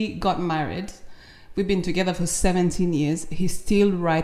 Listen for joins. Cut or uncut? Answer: uncut